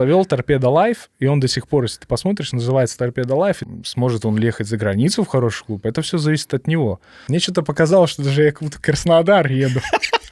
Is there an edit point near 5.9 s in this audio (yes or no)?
no